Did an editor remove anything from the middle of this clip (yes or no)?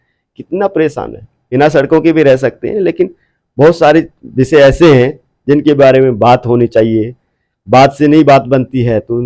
yes